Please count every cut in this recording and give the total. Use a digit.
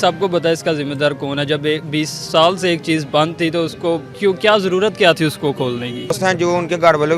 2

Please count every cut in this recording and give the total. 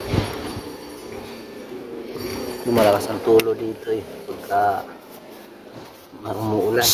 0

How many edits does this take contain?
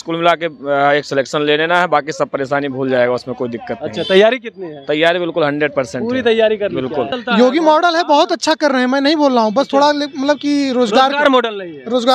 1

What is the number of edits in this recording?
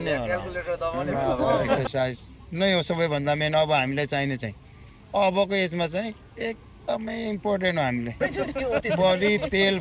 2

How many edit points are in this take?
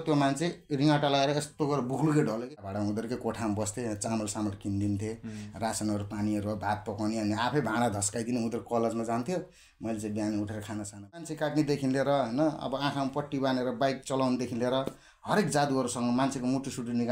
2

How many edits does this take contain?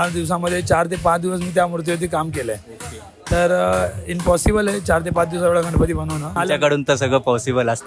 1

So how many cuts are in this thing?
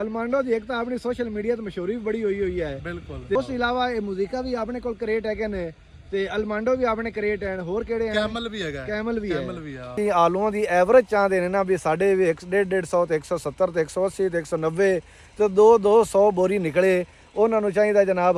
2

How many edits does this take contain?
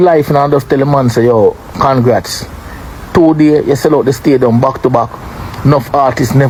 0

